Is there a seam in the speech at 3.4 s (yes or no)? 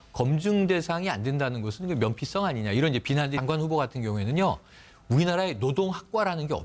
no